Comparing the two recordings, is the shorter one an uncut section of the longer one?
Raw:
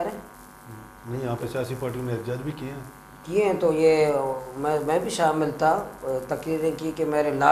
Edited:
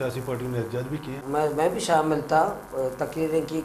no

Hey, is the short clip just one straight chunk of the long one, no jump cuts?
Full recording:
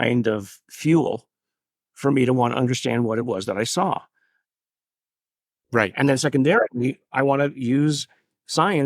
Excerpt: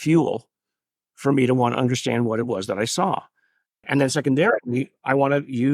no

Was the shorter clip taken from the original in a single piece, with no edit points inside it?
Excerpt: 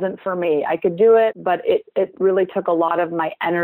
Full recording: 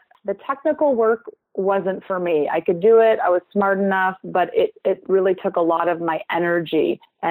no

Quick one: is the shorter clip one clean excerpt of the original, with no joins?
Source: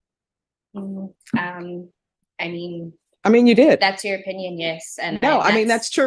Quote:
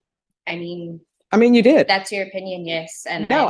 yes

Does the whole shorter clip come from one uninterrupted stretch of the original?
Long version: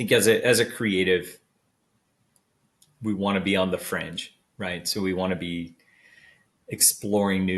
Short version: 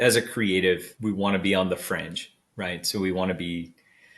no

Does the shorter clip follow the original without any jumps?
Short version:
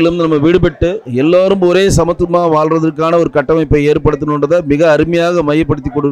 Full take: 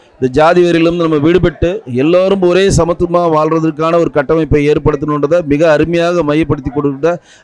yes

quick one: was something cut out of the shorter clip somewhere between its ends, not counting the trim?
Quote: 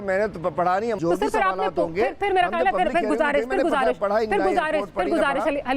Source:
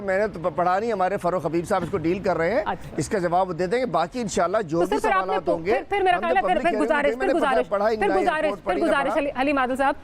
yes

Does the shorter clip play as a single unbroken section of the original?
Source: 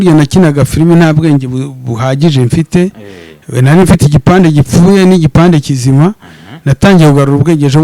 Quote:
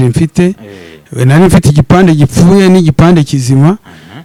yes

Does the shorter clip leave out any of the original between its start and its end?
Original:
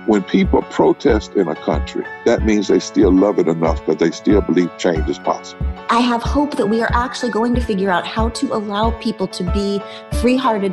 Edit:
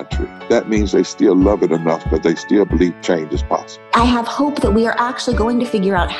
yes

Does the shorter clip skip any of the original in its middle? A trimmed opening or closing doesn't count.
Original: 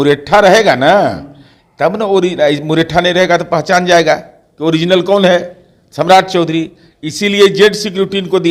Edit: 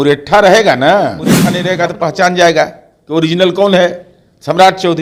yes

